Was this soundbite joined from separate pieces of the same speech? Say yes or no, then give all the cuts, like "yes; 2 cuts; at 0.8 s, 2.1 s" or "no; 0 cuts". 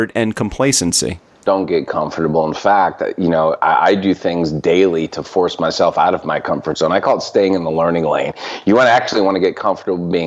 yes; 1 cut; at 1.4 s